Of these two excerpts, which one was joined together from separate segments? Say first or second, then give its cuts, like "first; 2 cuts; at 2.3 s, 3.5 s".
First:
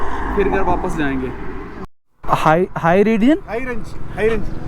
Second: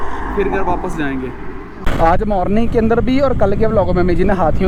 first; 1 cut; at 1.8 s